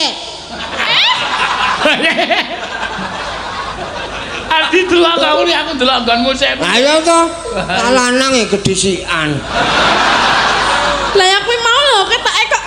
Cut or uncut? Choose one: uncut